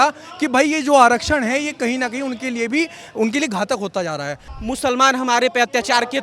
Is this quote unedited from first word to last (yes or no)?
no